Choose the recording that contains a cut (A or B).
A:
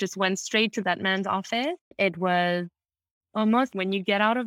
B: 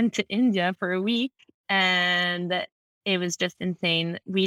A